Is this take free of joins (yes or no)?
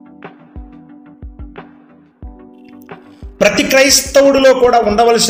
no